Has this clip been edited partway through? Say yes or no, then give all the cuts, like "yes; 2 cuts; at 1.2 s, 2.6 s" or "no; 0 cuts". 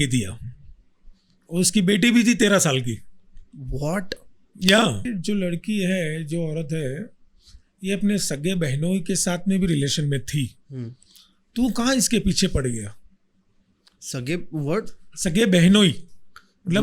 yes; 1 cut; at 5.1 s